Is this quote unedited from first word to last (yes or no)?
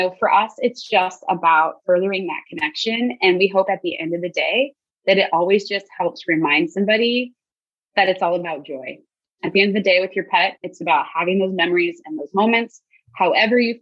yes